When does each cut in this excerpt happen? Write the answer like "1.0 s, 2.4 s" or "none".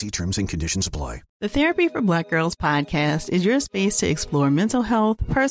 1.2 s